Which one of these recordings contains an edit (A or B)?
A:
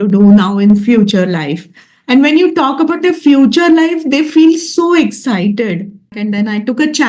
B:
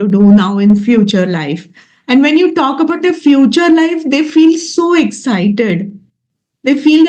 A